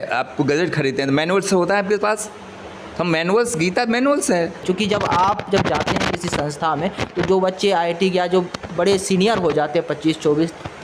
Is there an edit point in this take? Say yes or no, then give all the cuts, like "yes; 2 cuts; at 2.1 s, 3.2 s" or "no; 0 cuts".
yes; 1 cut; at 4.6 s